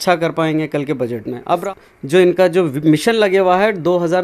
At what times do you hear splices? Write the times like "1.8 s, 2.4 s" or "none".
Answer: 1.6 s